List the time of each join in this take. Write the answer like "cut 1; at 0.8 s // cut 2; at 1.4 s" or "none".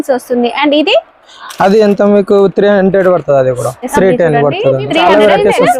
cut 1; at 3.9 s // cut 2; at 5.0 s